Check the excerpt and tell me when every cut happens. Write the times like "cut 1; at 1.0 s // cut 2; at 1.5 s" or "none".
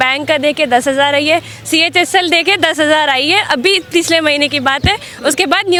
none